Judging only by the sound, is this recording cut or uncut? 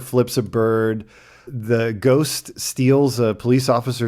cut